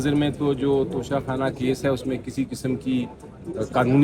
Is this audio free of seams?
yes; 0 cuts

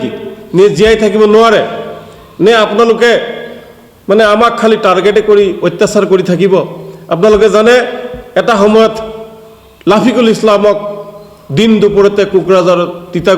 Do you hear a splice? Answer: no; 0 cuts

